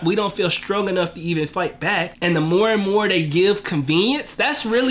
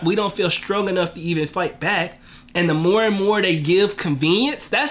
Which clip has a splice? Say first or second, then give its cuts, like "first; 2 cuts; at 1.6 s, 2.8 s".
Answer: first; 1 cut; at 2.1 s